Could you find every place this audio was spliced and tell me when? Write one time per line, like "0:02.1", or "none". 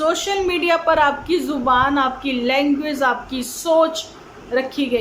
none